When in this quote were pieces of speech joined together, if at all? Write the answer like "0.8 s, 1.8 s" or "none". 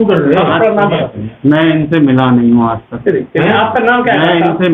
none